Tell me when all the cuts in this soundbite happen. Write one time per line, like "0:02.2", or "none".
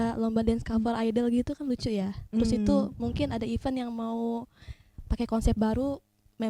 none